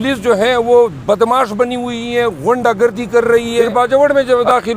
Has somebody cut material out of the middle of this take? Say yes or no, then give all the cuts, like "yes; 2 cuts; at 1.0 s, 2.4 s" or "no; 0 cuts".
yes; 1 cut; at 3.7 s